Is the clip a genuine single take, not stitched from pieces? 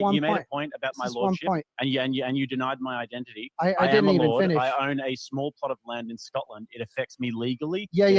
yes; 0 cuts

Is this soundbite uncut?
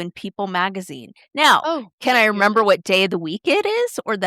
yes; 0 cuts

